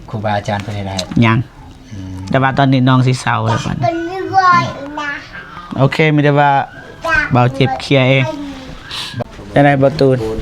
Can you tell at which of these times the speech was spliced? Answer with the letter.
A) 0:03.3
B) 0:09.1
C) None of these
B